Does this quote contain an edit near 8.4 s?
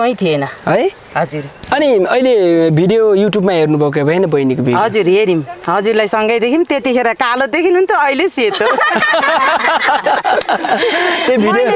no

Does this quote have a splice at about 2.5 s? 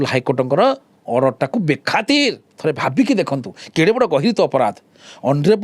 yes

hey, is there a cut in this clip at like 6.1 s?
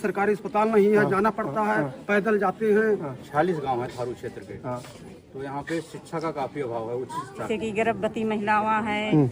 no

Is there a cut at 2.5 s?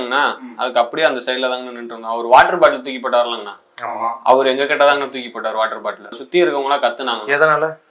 no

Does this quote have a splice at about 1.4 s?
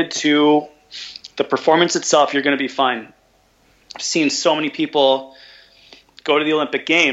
no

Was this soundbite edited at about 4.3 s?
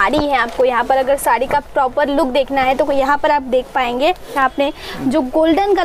yes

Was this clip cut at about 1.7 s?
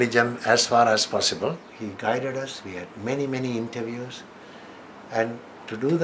yes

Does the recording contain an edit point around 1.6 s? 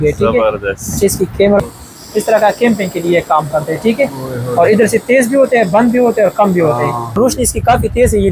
yes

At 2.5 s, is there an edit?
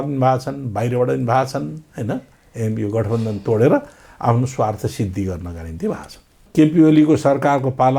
no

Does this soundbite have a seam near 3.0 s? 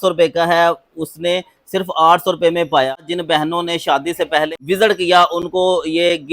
yes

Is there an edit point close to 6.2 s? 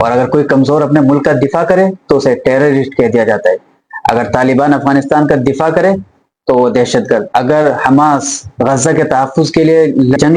no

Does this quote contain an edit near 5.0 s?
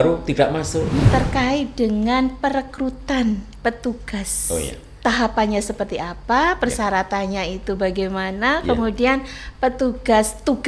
yes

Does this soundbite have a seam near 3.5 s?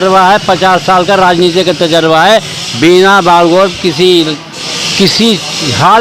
no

